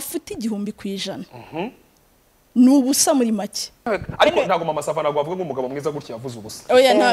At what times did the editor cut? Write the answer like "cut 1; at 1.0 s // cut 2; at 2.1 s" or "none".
cut 1; at 3.9 s